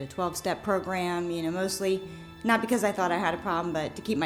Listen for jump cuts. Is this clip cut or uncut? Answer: uncut